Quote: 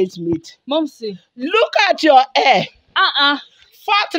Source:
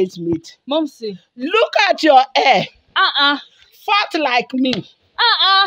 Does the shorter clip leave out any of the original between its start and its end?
no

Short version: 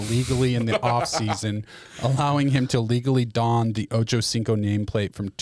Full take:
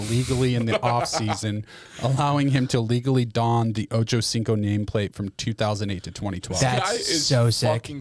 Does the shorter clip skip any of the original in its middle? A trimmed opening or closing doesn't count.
no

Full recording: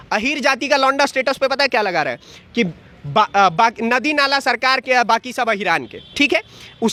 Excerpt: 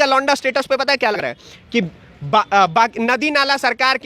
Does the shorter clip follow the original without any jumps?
no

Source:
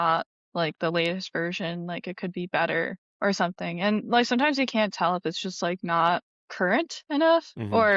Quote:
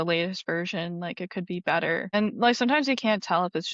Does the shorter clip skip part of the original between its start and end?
yes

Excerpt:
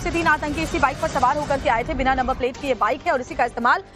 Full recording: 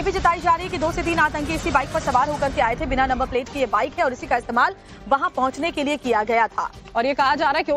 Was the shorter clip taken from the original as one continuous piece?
yes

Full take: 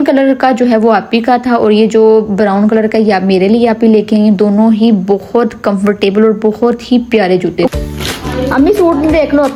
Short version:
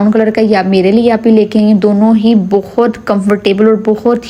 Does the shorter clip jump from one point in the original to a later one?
no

